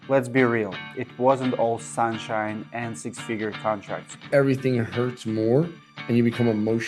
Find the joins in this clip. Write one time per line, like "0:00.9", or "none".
0:04.3

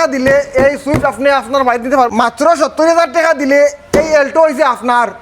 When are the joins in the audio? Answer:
0:02.1

